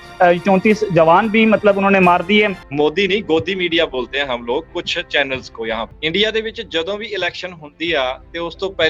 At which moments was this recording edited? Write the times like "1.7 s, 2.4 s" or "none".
2.6 s, 5.9 s